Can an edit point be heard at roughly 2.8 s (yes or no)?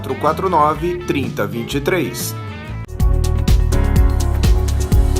yes